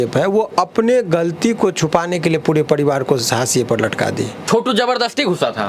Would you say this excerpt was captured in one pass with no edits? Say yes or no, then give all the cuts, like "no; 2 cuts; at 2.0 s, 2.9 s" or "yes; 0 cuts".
no; 1 cut; at 4.4 s